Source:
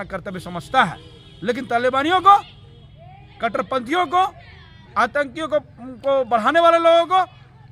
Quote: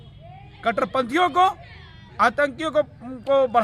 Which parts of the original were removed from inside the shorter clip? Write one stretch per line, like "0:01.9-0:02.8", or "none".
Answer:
none

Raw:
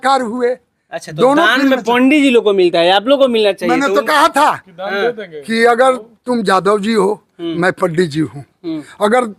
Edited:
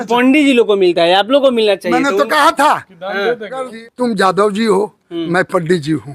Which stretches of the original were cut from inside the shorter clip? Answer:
0:05.5-0:06.0

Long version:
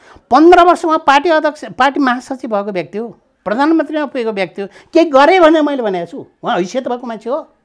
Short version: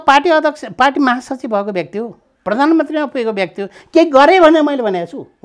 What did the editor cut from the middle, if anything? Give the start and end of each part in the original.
none

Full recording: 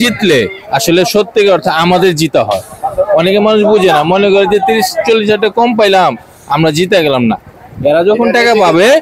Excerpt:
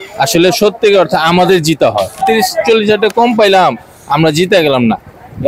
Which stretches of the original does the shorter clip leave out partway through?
0:02.8-0:04.6

